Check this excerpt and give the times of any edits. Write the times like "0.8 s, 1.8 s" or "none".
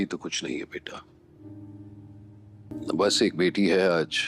1.4 s